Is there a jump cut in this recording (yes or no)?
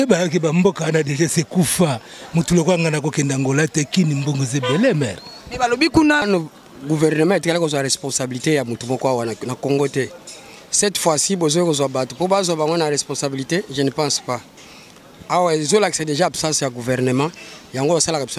yes